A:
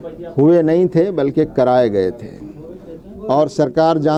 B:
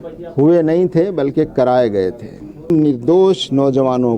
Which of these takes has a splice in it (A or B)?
B